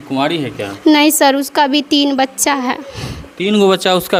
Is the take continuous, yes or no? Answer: yes